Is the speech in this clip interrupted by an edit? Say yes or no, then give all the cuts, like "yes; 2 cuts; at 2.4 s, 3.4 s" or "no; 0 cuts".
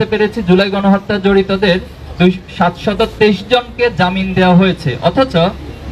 no; 0 cuts